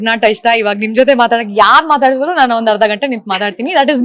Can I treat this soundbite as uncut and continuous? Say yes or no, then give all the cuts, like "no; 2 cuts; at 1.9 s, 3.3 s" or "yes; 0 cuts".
yes; 0 cuts